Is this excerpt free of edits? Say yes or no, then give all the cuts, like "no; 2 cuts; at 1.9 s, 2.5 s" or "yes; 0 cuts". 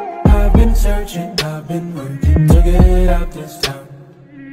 yes; 0 cuts